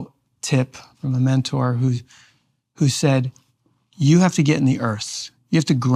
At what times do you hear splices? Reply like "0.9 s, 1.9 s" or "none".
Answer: 0.9 s